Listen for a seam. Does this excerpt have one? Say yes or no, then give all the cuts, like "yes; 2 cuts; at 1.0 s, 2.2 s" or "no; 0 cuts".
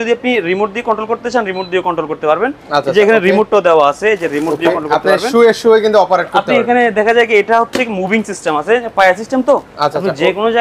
no; 0 cuts